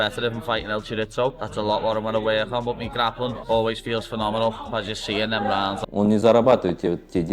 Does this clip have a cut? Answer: yes; 1 cut; at 5.8 s

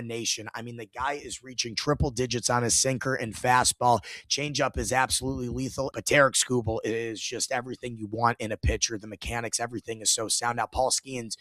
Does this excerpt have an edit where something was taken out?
yes; 1 cut; at 5.9 s

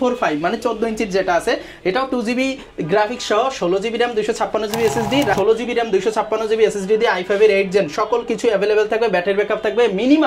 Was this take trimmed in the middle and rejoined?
yes; 1 cut; at 5.3 s

